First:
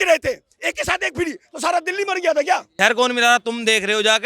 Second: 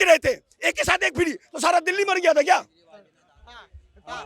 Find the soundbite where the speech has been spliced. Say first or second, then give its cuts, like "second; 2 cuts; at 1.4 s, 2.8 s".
first; 1 cut; at 2.7 s